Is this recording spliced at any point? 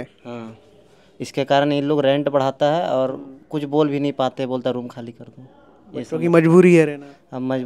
no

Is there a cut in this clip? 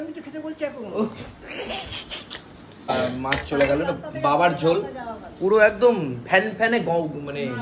yes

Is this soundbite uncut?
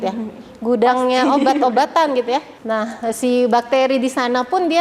no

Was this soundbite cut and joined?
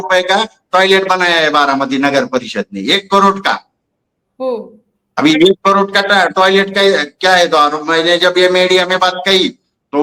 no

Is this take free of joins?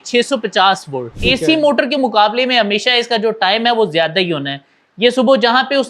no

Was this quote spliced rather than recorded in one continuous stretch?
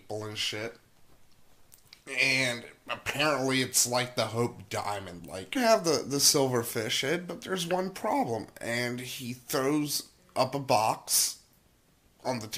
no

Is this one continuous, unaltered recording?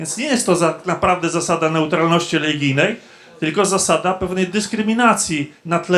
yes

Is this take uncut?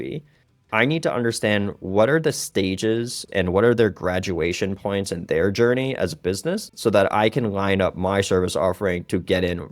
yes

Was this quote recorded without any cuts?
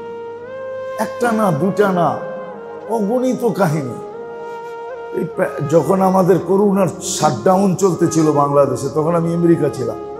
no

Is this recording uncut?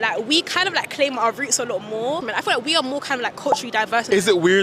yes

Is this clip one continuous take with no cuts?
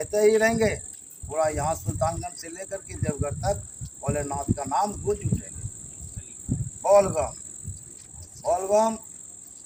yes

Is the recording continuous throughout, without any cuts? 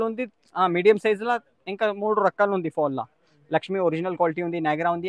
yes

